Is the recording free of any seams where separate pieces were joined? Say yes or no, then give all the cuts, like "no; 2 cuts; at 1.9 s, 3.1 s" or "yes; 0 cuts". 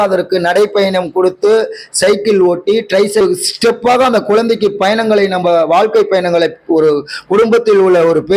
no; 1 cut; at 3.2 s